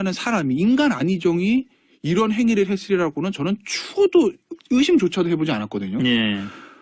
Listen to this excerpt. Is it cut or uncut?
cut